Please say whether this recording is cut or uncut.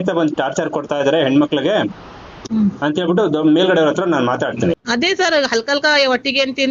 cut